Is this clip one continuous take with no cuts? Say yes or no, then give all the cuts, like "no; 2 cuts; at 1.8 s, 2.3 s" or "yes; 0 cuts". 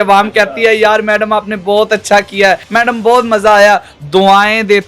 no; 1 cut; at 2.7 s